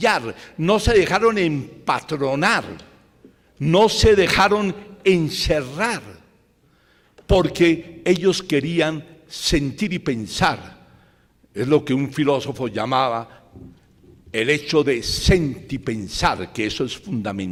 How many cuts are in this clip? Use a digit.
0